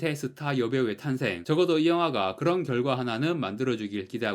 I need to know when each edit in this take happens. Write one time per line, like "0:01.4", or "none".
none